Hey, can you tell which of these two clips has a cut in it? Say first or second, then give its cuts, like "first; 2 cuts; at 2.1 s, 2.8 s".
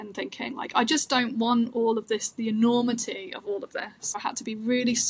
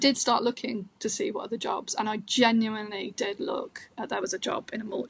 first; 1 cut; at 4.2 s